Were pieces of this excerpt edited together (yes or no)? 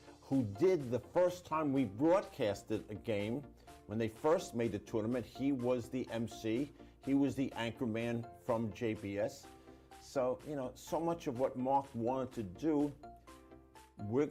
no